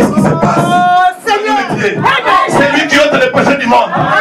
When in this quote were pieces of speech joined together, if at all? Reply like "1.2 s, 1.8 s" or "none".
1.7 s